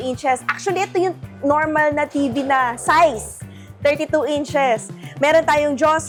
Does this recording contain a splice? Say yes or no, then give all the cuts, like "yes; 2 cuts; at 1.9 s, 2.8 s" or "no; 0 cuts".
no; 0 cuts